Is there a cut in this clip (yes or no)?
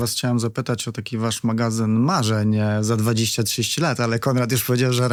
no